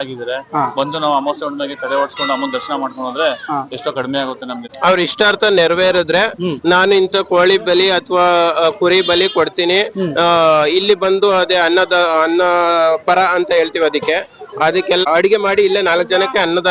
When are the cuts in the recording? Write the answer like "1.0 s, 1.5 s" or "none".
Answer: 4.7 s, 15.0 s